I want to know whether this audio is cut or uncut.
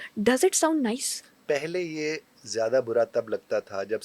uncut